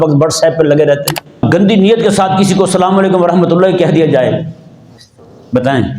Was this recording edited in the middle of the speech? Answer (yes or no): yes